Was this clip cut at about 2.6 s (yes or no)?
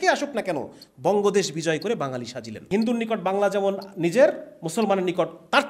yes